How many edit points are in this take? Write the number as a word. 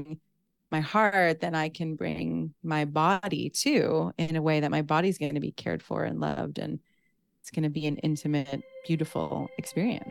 one